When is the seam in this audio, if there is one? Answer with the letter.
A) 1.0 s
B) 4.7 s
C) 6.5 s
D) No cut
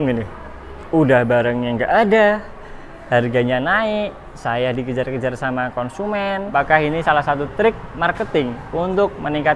C